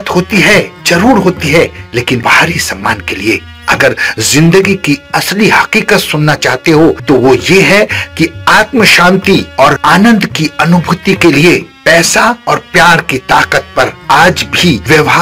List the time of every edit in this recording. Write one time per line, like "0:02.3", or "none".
0:02.2
0:07.0
0:09.8